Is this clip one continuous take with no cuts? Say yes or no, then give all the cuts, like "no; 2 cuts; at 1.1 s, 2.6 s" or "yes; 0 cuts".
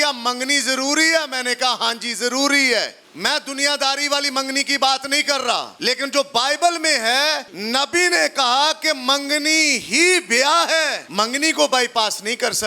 no; 4 cuts; at 3.0 s, 5.7 s, 7.5 s, 11.0 s